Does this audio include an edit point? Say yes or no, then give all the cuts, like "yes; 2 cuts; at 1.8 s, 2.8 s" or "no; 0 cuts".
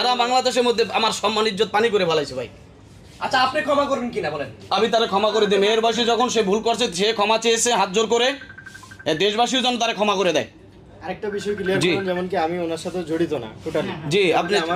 no; 0 cuts